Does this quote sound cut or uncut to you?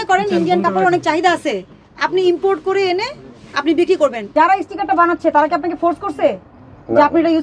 cut